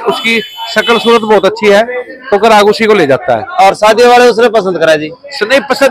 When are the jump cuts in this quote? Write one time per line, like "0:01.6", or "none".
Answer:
0:03.5